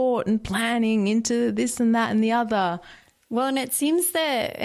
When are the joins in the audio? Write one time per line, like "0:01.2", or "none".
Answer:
none